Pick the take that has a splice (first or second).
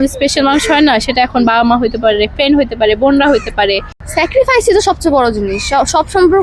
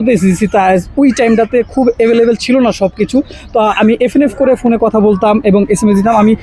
first